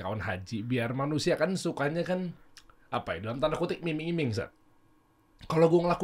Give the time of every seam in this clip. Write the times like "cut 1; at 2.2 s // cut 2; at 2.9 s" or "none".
none